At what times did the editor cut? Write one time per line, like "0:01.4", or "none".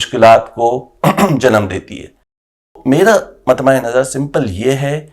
0:02.7